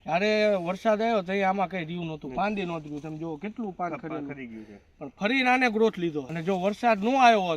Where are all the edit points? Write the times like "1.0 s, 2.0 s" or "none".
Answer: 6.3 s